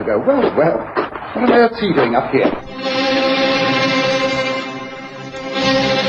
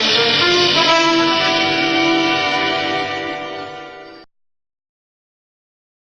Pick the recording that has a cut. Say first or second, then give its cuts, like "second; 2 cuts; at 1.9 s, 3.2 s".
second; 1 cut; at 3.0 s